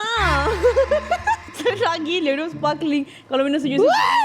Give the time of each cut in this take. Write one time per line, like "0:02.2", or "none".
0:01.4